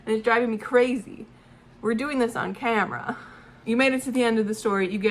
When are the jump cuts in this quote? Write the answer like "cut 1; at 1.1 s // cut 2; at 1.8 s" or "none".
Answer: cut 1; at 3.5 s